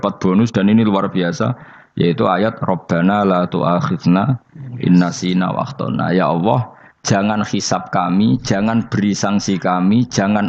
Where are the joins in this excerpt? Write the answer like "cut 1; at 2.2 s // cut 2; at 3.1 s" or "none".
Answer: none